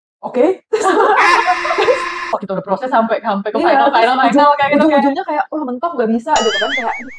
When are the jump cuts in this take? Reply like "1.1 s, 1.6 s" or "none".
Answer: 2.4 s